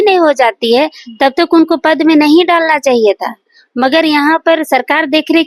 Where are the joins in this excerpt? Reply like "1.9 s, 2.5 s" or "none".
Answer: none